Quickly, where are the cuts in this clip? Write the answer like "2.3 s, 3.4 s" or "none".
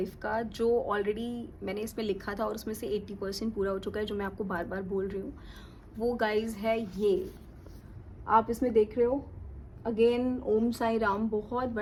none